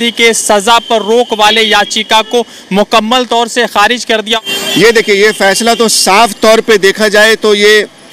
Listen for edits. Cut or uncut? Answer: cut